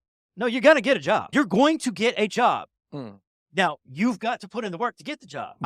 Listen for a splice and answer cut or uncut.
uncut